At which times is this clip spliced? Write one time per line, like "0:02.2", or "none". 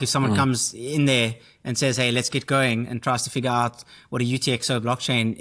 none